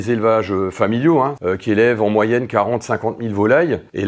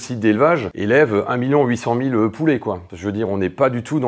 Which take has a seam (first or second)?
first